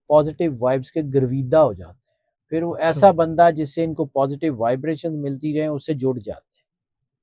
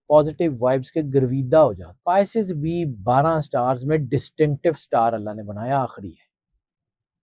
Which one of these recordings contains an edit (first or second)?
second